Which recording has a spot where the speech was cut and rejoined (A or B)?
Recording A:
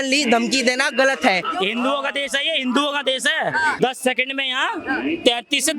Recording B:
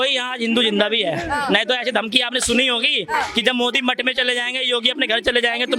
A